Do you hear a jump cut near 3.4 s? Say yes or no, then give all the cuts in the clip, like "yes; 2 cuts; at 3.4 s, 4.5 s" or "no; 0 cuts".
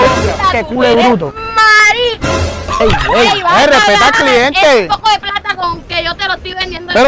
no; 0 cuts